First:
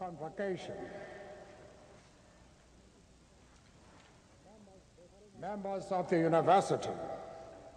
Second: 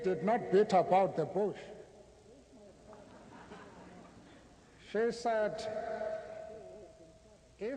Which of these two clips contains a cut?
second; 1 cut; at 3.6 s

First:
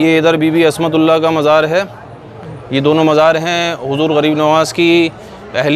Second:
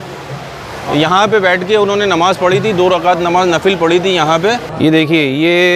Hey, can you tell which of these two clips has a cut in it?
second; 1 cut; at 4.7 s

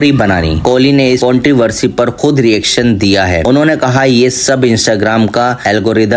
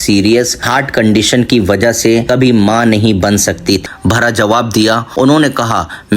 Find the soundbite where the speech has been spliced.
second; 1 cut; at 3.8 s

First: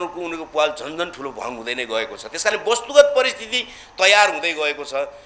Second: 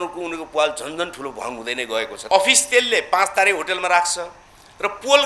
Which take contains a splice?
second; 1 cut; at 2.2 s

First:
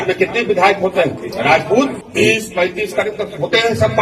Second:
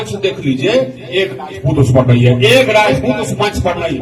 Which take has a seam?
first; 2 cuts; at 1.2 s, 2.0 s

